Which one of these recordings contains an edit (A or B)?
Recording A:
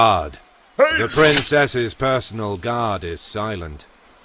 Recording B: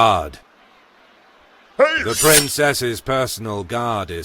A